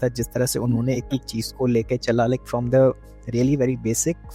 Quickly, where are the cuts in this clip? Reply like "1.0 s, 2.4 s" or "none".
none